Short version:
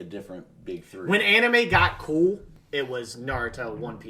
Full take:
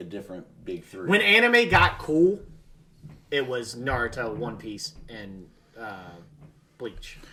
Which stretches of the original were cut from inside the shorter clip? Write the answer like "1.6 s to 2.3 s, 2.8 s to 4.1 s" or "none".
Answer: 2.5 s to 3.1 s